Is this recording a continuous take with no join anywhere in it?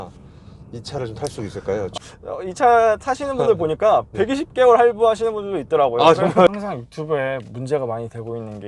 no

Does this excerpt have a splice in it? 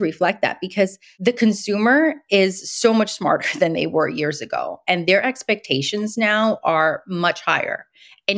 yes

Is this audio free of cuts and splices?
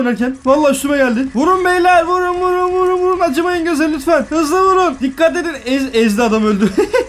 yes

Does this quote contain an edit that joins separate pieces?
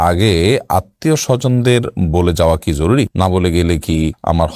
no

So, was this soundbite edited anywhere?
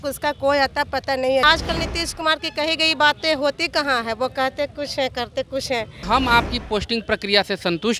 yes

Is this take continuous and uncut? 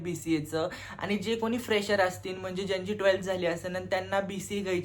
yes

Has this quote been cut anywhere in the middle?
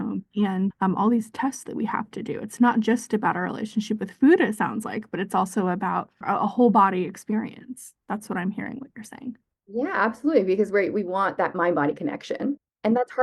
yes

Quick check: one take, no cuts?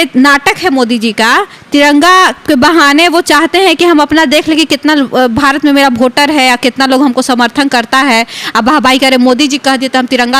yes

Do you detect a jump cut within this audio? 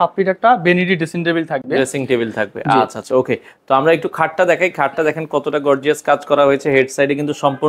no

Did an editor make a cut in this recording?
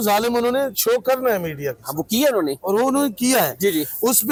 no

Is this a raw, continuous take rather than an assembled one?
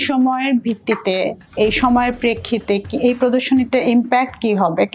yes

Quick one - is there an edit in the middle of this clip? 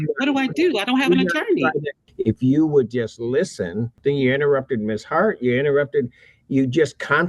yes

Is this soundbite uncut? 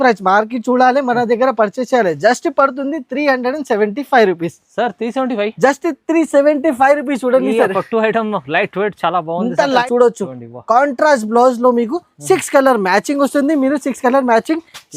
no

